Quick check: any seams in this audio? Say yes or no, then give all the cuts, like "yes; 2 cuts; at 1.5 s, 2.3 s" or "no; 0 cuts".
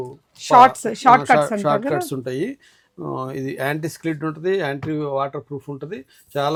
no; 0 cuts